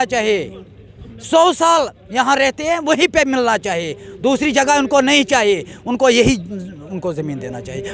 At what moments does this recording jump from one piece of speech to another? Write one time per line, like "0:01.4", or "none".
none